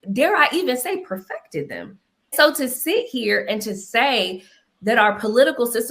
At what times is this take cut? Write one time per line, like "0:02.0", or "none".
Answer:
0:02.3